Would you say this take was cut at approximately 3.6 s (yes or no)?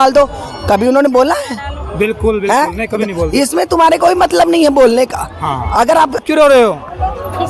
no